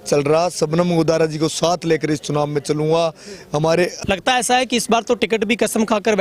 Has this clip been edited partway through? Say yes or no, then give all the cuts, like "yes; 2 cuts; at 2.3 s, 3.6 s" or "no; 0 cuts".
yes; 1 cut; at 3.9 s